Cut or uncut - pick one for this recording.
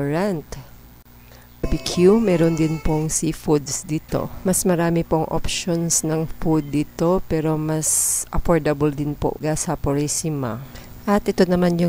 cut